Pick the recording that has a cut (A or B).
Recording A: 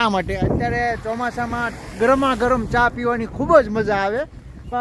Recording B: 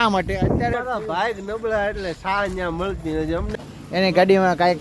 B